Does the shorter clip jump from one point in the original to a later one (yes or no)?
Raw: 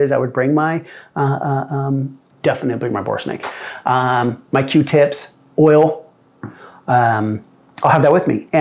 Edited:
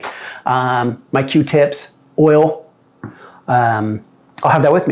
no